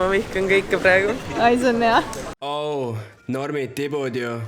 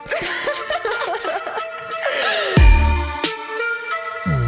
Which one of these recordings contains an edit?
first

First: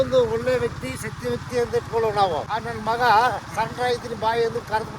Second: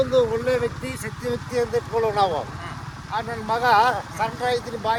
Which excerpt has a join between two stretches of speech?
first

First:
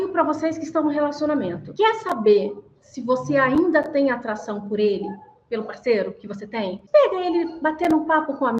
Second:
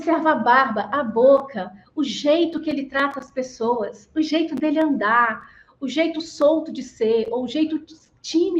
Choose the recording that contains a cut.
first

